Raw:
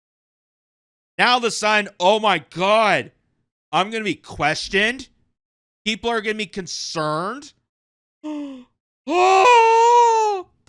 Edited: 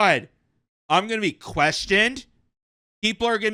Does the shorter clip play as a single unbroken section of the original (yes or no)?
yes